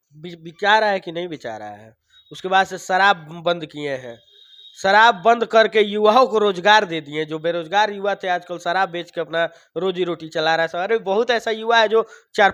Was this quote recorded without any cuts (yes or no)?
yes